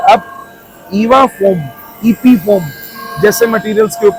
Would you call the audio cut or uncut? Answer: uncut